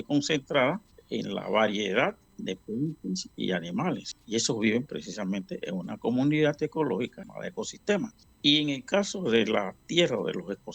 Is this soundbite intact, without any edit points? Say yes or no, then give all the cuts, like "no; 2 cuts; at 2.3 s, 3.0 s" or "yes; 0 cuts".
no; 5 cuts; at 0.9 s, 2.3 s, 4.1 s, 7.3 s, 8.2 s